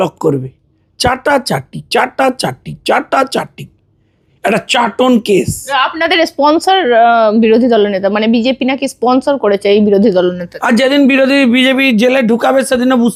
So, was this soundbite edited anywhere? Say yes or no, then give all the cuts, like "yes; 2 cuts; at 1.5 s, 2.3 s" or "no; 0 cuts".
no; 0 cuts